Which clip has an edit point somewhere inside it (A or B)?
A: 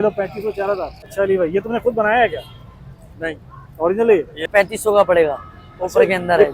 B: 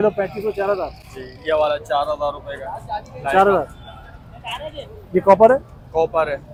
A